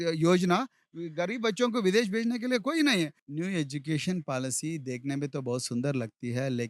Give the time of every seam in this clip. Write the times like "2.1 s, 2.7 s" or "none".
3.2 s